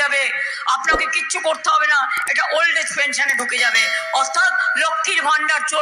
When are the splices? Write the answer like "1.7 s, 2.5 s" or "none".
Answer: none